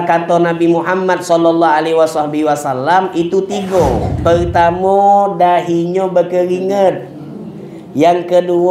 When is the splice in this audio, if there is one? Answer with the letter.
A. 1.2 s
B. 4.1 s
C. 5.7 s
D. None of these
B